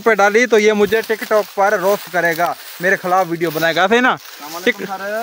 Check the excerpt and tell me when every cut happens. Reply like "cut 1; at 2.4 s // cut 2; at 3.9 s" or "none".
none